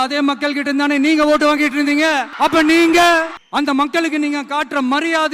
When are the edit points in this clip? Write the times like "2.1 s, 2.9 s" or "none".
2.3 s, 3.4 s